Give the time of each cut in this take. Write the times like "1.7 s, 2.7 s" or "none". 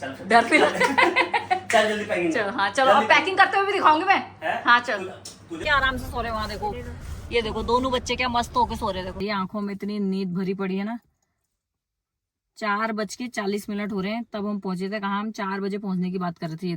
5.5 s, 9.1 s